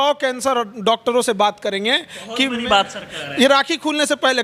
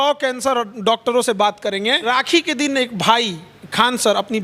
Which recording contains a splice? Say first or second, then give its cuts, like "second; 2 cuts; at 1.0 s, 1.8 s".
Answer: second; 1 cut; at 2.1 s